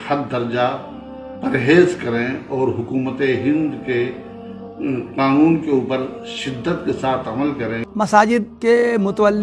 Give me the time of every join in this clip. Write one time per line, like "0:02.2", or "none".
0:07.8
0:08.5